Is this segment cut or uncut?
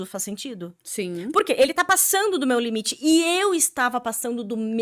uncut